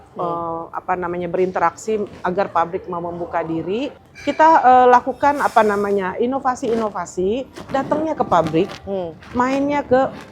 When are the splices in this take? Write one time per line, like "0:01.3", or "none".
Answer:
0:04.0